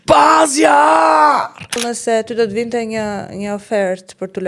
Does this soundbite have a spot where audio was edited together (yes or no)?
yes